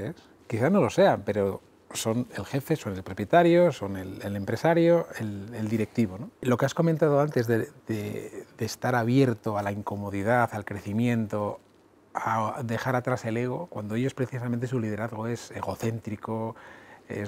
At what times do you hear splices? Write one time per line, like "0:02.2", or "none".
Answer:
0:06.4